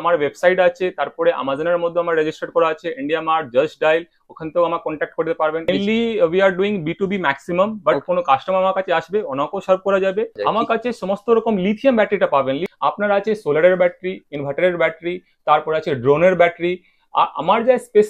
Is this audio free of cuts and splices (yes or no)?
no